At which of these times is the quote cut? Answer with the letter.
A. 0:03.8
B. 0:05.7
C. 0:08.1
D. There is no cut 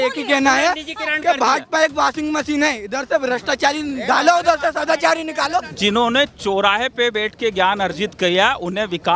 B